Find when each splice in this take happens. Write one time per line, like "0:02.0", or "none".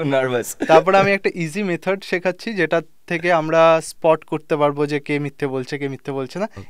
none